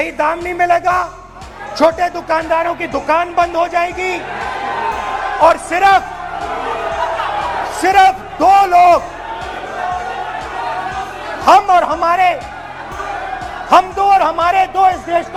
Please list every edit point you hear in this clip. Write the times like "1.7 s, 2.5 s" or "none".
none